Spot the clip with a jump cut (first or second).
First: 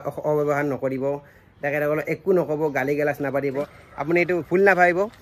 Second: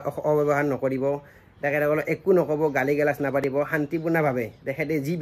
first